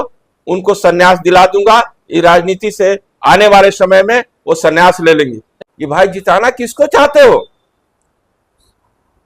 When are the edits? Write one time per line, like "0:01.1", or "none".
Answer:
0:05.6

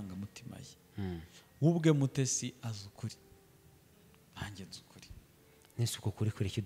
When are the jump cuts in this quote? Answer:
none

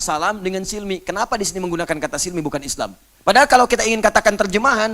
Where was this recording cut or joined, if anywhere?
0:03.1

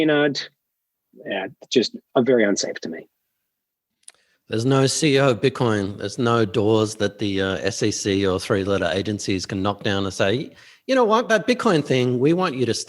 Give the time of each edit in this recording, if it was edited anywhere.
none

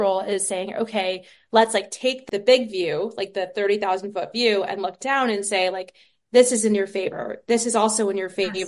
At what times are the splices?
0:02.2

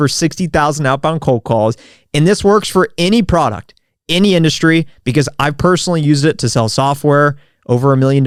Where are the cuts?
none

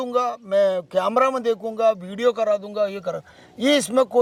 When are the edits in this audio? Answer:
none

